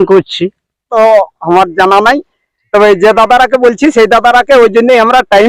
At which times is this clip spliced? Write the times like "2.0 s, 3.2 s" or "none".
0.9 s